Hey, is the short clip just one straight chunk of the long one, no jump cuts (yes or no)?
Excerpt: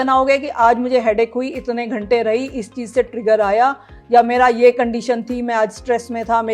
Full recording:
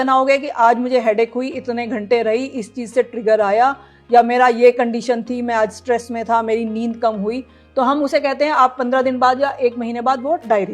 yes